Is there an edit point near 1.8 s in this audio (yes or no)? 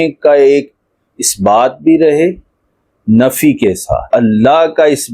no